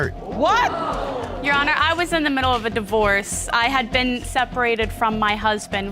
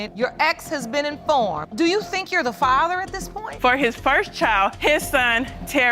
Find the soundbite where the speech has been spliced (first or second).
second